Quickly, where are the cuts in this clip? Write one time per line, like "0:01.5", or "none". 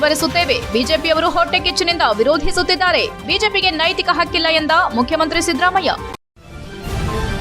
0:06.2